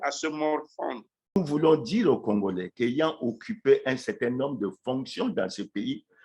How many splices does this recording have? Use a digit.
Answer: 1